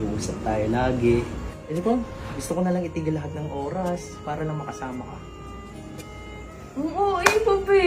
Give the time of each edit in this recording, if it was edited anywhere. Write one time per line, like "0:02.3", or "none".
0:01.5
0:02.2